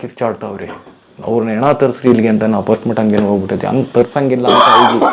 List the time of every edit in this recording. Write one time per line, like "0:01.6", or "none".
none